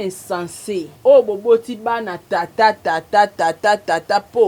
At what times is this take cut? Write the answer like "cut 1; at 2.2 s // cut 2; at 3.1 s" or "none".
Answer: cut 1; at 0.9 s